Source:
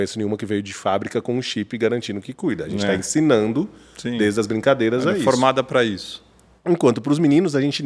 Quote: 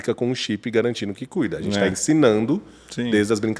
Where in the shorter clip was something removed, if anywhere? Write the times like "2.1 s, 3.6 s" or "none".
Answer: none